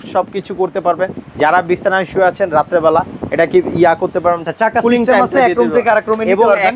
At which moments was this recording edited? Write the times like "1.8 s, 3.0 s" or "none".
4.5 s